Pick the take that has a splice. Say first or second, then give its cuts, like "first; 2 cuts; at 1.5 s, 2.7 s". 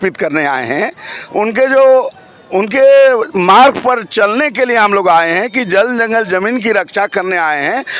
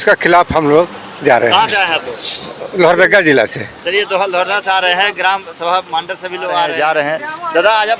second; 1 cut; at 6.7 s